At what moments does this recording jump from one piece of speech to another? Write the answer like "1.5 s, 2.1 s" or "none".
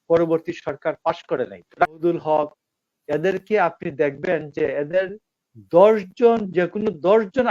2.0 s